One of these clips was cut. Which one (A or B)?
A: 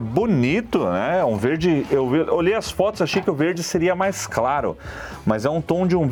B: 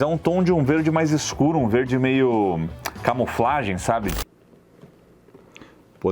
B